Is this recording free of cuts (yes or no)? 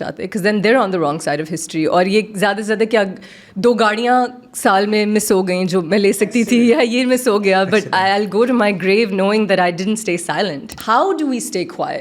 no